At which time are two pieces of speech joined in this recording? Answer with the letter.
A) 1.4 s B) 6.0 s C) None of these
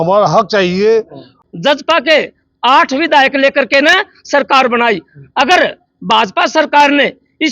A